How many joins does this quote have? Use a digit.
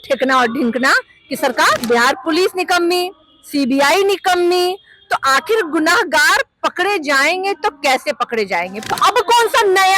2